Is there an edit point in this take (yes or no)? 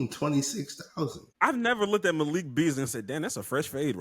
no